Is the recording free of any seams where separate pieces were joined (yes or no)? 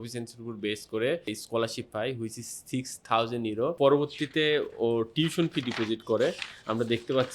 no